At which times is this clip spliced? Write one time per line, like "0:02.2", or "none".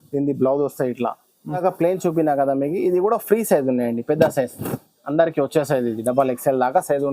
0:01.6